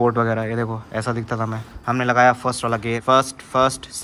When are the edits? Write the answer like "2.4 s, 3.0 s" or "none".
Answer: 1.7 s, 3.0 s